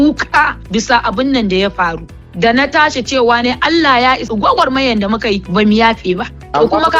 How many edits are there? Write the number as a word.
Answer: zero